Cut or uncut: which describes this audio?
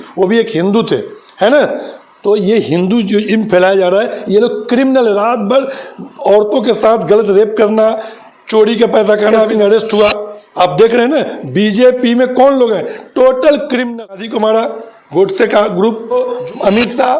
cut